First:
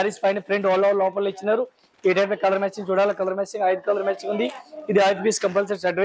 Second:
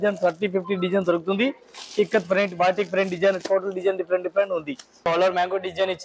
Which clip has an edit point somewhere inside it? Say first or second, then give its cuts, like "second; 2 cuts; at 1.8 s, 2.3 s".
second; 1 cut; at 5.1 s